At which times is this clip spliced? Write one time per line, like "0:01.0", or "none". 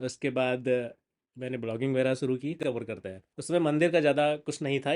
0:02.6